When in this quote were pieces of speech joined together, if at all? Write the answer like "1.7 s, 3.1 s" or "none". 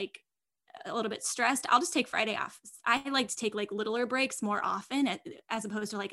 none